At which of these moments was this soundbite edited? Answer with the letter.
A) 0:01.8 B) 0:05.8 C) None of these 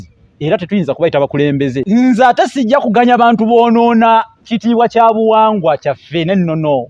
A